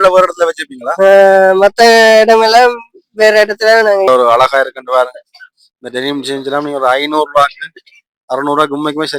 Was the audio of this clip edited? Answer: yes; 1 cut; at 4.1 s

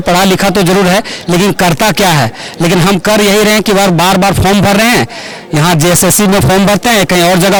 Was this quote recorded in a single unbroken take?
yes; 0 cuts

